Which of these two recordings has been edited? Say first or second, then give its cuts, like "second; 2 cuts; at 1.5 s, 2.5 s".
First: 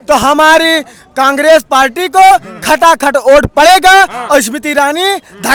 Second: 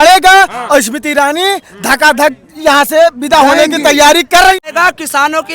second; 1 cut; at 4.6 s